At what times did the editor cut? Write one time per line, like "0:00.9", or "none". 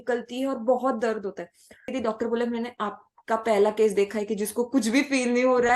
0:01.8